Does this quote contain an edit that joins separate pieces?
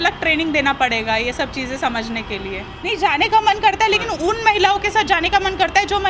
yes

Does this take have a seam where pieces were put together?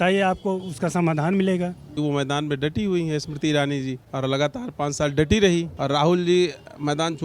yes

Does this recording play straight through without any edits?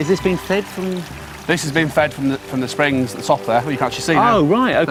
yes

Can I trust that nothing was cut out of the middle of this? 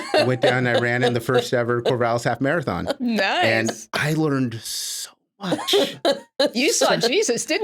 yes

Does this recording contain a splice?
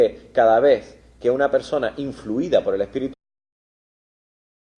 no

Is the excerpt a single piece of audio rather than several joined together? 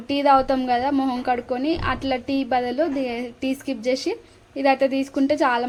yes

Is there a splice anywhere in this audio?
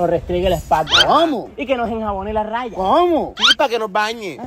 no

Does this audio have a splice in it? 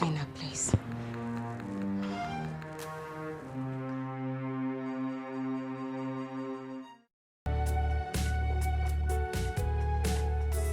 yes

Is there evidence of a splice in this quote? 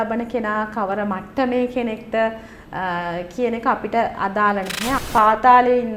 yes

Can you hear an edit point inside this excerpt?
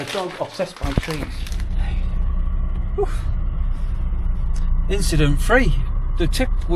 yes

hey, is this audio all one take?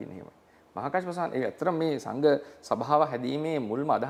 yes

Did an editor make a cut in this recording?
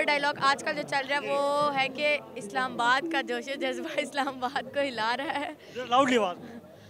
no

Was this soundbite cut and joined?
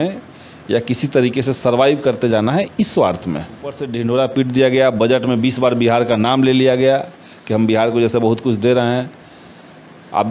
yes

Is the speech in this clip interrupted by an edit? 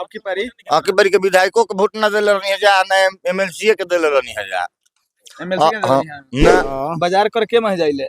yes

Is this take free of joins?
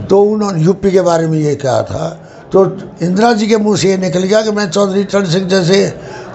yes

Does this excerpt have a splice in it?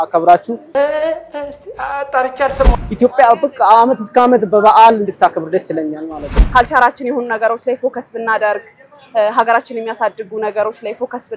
yes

